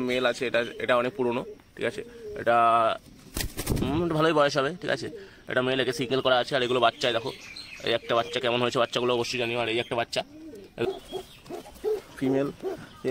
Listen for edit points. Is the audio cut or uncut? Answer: cut